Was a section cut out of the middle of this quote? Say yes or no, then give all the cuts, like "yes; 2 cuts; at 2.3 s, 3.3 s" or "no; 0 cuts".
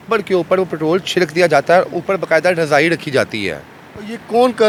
no; 0 cuts